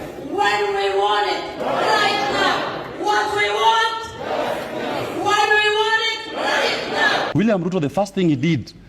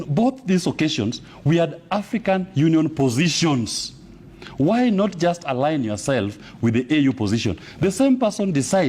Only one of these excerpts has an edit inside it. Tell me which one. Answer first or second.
first